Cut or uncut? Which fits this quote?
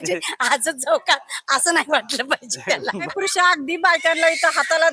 cut